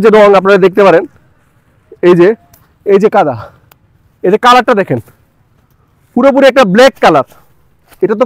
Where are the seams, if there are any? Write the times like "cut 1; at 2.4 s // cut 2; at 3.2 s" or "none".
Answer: none